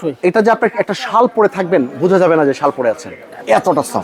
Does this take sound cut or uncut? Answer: uncut